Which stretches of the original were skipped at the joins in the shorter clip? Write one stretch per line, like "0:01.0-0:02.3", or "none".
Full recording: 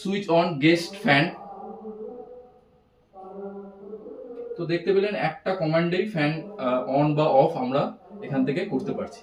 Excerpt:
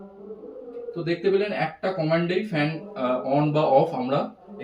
none